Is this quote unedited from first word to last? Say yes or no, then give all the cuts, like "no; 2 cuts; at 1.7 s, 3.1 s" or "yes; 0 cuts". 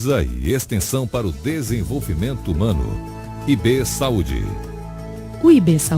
no; 1 cut; at 4.3 s